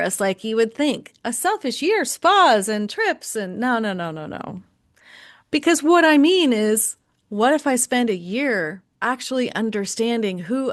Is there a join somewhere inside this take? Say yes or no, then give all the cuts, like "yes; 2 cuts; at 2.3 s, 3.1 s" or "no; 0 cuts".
yes; 1 cut; at 8.9 s